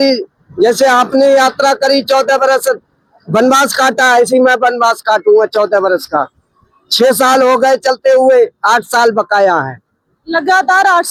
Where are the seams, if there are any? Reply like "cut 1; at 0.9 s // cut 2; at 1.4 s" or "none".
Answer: none